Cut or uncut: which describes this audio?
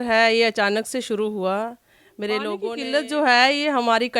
cut